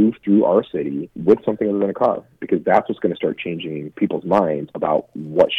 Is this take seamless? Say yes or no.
no